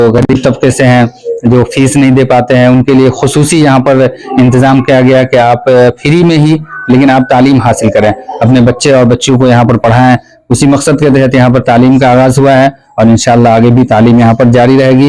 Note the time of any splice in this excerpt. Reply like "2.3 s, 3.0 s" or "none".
none